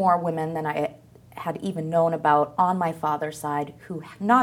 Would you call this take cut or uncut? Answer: uncut